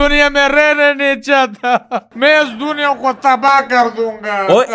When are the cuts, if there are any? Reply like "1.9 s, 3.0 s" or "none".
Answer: 2.0 s

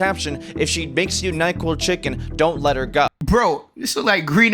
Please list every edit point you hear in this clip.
3.2 s

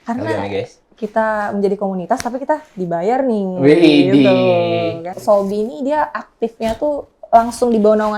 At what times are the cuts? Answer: 5.2 s

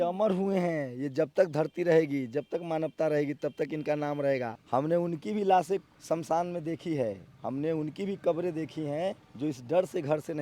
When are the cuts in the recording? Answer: 4.6 s, 5.9 s, 9.3 s

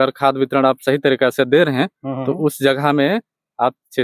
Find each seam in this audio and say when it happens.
none

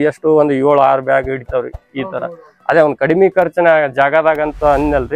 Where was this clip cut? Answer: none

